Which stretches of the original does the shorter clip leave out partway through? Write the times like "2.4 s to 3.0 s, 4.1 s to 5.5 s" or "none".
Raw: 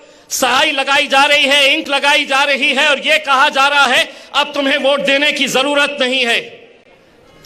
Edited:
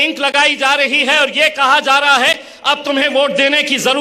none